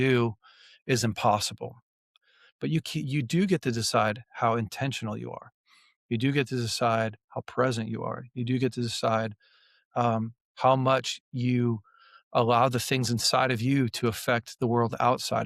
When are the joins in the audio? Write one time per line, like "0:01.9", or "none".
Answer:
0:02.0